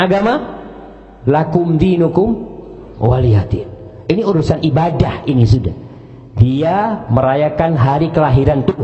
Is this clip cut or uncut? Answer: uncut